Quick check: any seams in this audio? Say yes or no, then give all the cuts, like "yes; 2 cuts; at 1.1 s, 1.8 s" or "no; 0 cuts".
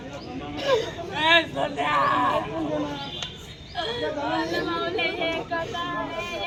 no; 0 cuts